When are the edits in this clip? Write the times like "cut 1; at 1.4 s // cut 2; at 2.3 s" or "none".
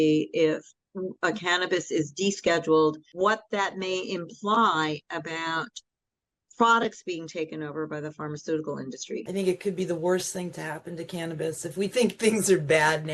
cut 1; at 3.0 s // cut 2; at 9.2 s

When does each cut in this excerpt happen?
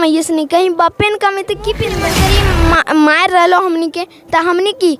cut 1; at 2.1 s

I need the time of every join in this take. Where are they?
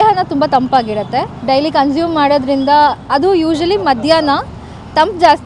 cut 1; at 1.3 s

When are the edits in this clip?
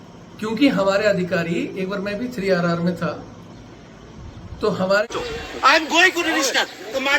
cut 1; at 5.1 s

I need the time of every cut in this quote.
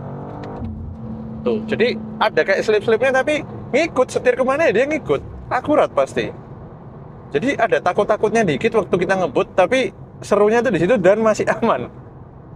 none

